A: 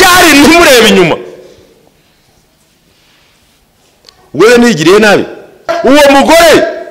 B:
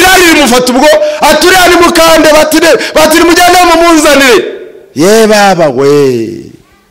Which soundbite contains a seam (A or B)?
A